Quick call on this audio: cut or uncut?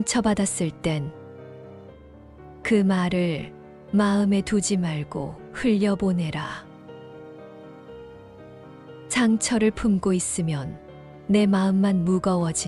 uncut